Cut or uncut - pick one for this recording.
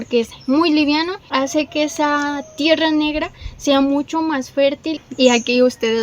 cut